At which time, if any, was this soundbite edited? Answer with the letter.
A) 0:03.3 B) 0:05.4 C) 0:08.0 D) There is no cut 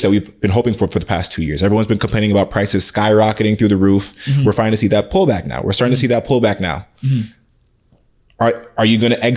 D